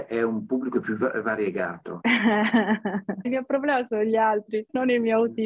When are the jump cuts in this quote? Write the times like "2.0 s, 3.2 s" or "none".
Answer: 1.8 s, 3.3 s, 4.7 s